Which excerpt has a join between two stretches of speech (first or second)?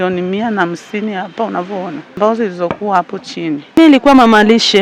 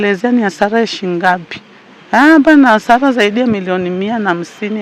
first